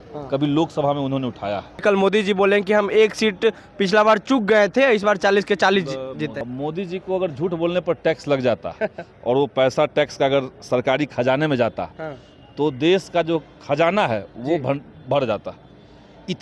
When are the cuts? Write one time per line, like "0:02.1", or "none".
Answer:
0:01.8
0:06.4